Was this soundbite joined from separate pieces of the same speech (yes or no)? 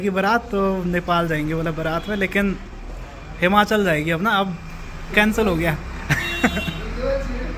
no